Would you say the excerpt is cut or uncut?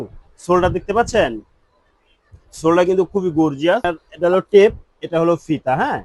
cut